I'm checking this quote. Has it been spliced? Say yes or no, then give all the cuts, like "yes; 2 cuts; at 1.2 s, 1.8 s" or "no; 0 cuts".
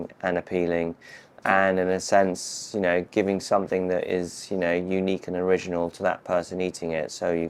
no; 0 cuts